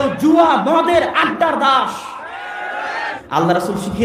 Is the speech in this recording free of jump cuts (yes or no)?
no